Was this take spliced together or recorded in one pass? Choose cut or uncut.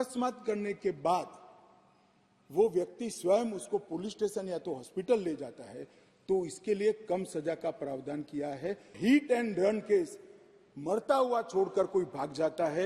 cut